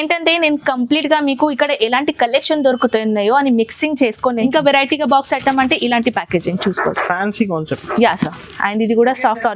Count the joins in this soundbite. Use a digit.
1